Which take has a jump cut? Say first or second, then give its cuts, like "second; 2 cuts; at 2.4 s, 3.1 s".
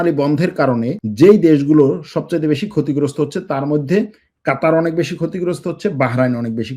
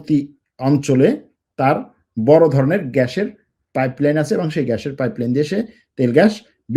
first; 1 cut; at 1.0 s